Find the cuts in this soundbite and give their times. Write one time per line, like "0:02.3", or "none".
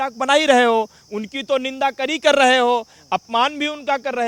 none